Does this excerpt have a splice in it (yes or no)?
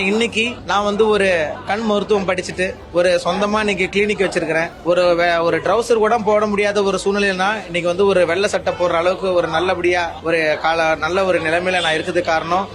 yes